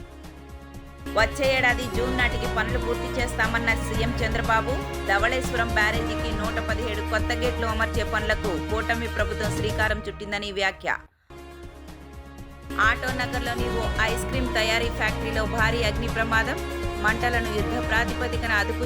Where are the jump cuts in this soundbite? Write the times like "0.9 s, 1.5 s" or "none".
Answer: 1.0 s